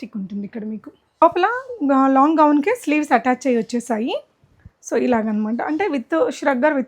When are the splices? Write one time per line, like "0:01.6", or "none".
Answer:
0:01.2